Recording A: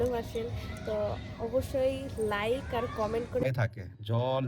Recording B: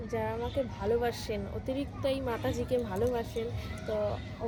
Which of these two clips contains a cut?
A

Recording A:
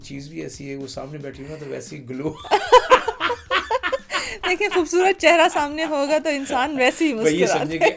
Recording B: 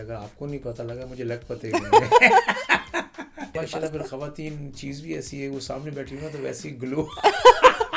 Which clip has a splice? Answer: B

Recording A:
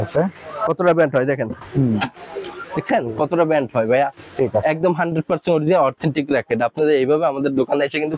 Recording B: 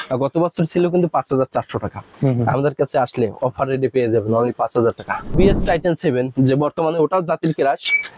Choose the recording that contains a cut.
B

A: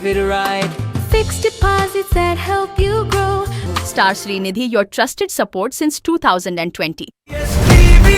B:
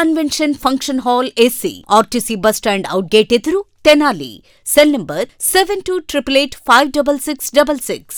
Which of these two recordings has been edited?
A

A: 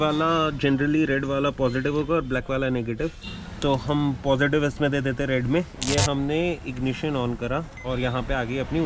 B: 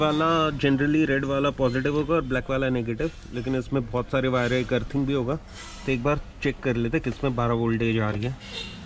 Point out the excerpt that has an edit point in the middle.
A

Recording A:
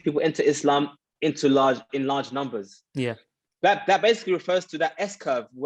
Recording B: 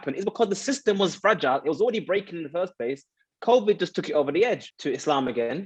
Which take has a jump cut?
B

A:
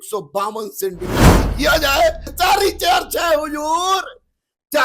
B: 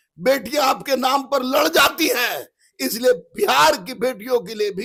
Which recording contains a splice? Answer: A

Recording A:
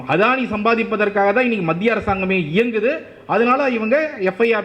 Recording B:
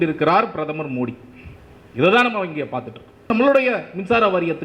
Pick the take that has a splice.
B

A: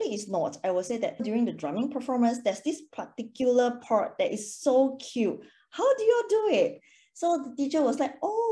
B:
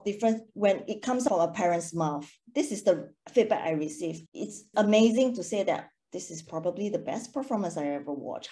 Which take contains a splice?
B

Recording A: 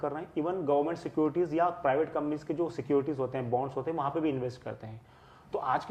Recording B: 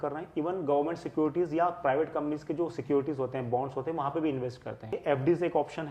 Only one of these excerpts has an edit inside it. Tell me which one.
B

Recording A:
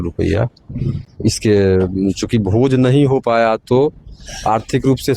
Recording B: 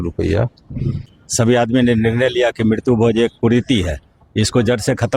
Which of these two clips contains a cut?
B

